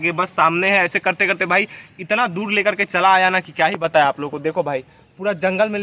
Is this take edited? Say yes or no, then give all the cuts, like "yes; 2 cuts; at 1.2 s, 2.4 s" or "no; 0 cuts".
no; 0 cuts